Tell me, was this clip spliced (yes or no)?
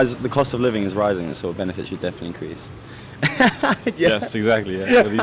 no